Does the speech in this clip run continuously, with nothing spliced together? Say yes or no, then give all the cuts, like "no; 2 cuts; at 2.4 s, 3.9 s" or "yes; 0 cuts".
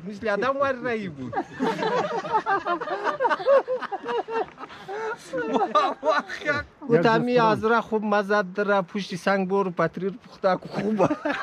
no; 1 cut; at 6.7 s